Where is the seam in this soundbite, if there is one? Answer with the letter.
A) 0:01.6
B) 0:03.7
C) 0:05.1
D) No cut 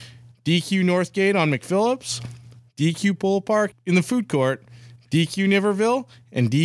B